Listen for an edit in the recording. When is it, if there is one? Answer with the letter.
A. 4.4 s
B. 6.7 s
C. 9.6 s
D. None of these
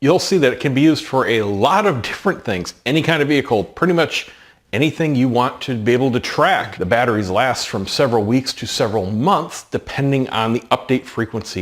B